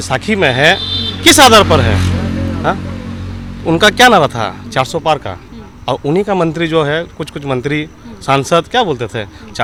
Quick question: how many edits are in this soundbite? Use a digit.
0